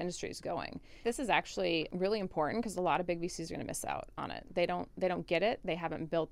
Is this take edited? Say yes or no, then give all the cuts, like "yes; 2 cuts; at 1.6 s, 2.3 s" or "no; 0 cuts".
yes; 2 cuts; at 1.0 s, 1.9 s